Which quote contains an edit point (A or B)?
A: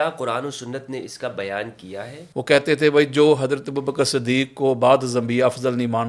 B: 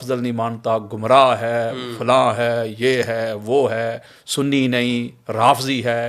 A